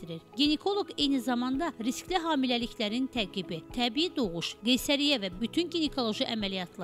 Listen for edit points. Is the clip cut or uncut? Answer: uncut